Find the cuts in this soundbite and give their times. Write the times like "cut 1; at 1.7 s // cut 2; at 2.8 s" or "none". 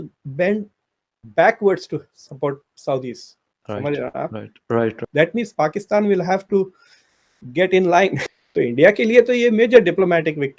cut 1; at 5.1 s // cut 2; at 8.3 s